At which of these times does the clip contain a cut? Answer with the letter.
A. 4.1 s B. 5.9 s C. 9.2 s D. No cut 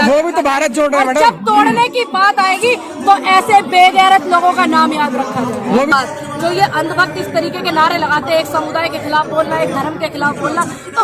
B